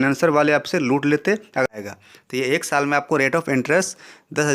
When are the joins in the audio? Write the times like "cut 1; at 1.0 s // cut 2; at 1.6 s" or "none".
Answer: cut 1; at 1.7 s